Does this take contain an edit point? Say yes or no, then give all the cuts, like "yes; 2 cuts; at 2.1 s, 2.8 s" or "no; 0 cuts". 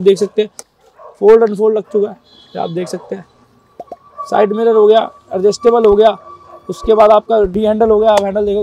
no; 0 cuts